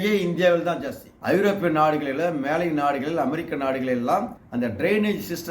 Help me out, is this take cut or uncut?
cut